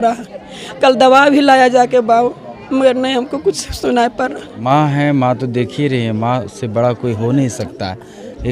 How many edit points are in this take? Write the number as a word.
one